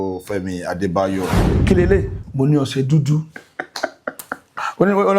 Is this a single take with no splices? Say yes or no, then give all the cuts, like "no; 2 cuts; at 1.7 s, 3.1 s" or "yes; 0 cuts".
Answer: no; 1 cut; at 1.5 s